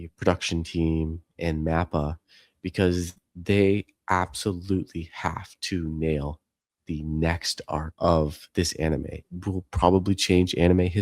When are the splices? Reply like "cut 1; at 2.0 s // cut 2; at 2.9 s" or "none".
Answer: cut 1; at 7.9 s // cut 2; at 9.2 s